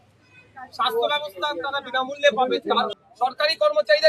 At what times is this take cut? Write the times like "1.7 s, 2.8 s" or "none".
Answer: 3.0 s